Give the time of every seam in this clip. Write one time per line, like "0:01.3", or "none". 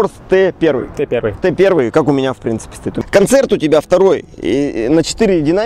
0:02.9